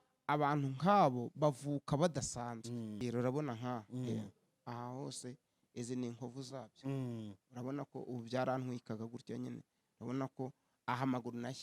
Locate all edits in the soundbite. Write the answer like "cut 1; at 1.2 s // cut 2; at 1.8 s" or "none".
cut 1; at 3.0 s